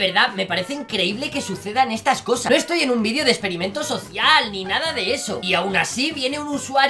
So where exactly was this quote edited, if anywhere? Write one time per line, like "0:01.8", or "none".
none